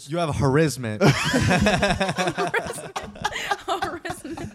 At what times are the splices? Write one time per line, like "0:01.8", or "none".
none